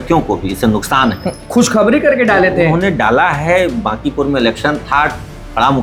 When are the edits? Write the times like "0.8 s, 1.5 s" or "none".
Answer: none